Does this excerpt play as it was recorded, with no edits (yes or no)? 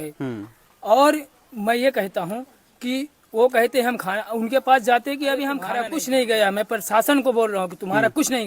no